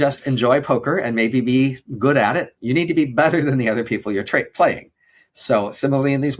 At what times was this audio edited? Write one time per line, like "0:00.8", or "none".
none